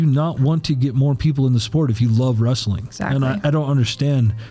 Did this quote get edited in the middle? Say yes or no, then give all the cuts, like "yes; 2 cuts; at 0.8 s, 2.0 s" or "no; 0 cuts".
no; 0 cuts